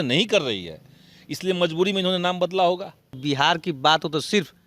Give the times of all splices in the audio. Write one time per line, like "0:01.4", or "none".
0:03.1